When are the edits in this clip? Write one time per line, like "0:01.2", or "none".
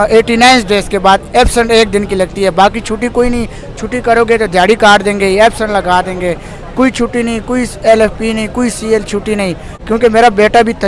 0:09.7